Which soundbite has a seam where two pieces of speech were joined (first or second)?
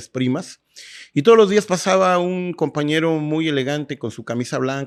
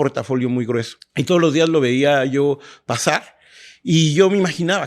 second